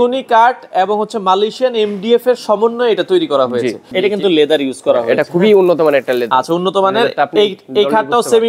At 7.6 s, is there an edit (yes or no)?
no